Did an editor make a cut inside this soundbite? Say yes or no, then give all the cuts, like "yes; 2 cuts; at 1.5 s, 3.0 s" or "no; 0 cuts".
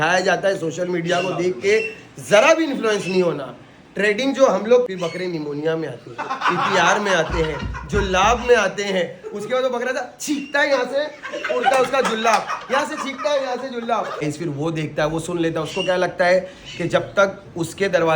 yes; 2 cuts; at 4.9 s, 14.2 s